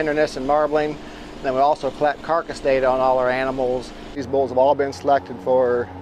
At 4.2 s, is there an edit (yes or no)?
yes